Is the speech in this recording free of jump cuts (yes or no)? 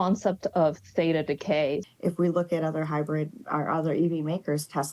no